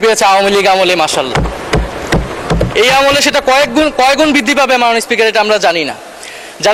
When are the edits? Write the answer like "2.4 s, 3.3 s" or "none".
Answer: none